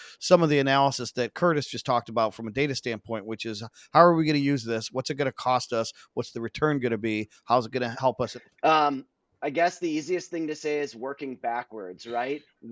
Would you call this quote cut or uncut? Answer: cut